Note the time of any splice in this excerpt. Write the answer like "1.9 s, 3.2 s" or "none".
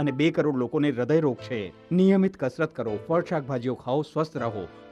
none